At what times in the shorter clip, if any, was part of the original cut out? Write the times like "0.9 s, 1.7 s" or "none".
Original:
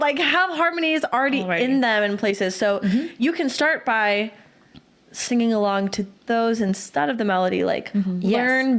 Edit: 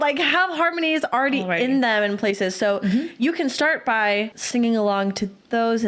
4.4 s